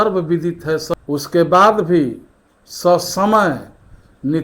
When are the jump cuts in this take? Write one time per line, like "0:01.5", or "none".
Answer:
0:00.9